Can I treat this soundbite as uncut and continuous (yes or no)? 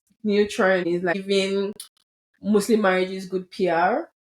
no